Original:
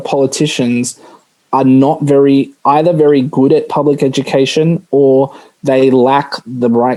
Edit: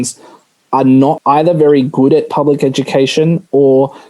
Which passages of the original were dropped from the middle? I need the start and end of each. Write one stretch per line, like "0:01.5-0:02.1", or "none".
0:02.0-0:02.6